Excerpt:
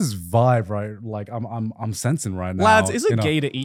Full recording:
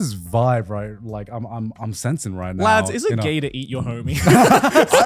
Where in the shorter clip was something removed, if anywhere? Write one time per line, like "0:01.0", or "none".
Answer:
none